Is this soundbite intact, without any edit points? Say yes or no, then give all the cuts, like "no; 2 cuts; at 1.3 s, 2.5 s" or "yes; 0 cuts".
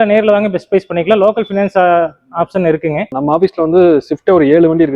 no; 1 cut; at 3.1 s